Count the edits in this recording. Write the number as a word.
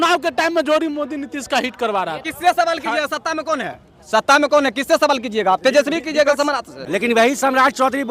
two